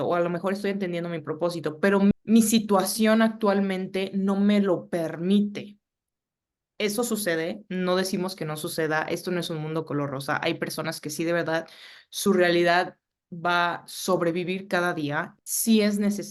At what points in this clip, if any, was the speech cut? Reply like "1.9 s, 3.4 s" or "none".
15.3 s